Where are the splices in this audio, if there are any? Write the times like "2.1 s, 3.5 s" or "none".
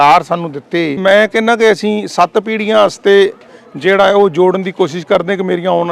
1.0 s

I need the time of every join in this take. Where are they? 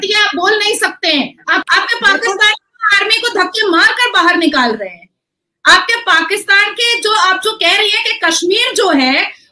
1.6 s

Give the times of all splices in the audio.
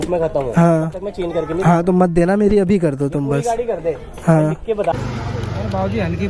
4.9 s

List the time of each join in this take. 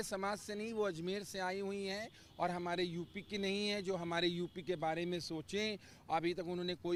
none

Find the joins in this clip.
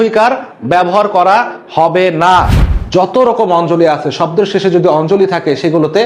2.6 s

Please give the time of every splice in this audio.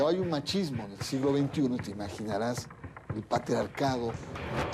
none

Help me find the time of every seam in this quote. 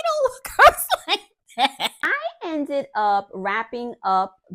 2.1 s

